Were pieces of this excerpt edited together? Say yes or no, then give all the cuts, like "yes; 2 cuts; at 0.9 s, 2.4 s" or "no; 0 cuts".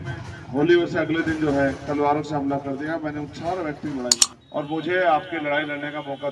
yes; 1 cut; at 4.3 s